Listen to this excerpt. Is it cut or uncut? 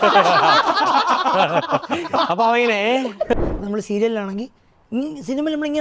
cut